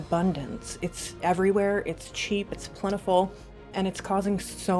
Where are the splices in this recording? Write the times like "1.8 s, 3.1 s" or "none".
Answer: 3.7 s